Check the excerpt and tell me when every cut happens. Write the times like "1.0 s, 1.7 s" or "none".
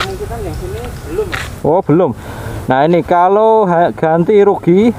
none